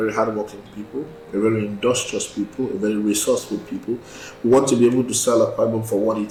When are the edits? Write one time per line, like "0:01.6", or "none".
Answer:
none